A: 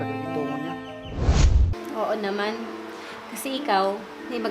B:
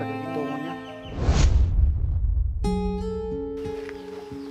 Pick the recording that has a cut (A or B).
A